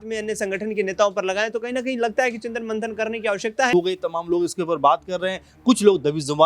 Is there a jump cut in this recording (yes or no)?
yes